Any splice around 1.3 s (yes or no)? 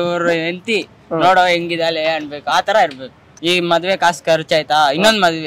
no